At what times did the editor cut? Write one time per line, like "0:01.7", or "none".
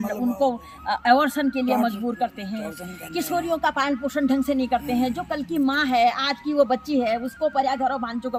none